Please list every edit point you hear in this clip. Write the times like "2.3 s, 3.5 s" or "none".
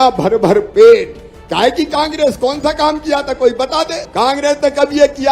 4.0 s